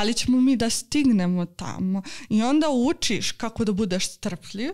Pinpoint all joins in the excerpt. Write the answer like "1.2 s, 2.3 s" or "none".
none